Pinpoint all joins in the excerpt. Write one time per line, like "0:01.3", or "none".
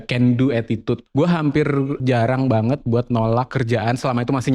0:01.0
0:02.0
0:03.5

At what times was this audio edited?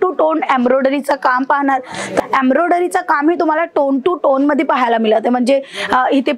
0:02.2

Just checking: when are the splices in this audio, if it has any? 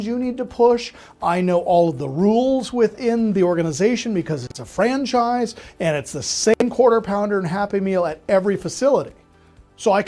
none

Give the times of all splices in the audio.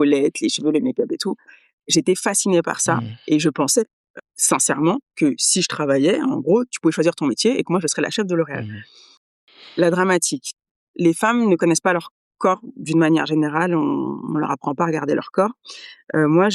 0:09.3

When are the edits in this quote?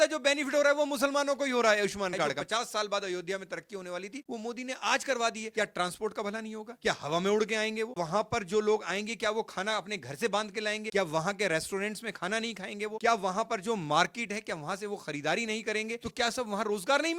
0:02.4
0:05.4
0:07.9

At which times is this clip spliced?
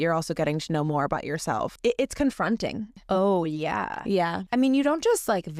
0:01.7
0:02.9
0:04.4

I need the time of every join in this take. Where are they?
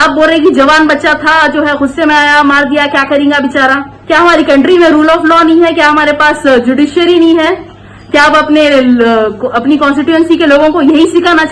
0:03.9

